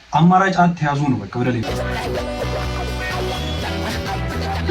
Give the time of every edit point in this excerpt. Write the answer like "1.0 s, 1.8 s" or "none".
1.6 s